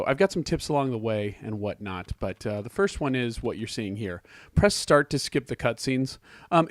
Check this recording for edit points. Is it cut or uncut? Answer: cut